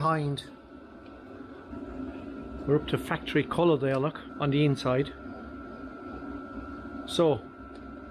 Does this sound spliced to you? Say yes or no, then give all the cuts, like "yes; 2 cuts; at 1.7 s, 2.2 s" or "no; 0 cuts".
yes; 2 cuts; at 1.7 s, 4.3 s